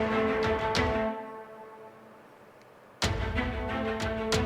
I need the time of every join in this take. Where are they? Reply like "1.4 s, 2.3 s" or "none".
2.6 s